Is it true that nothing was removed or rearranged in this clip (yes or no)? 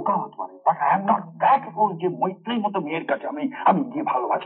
yes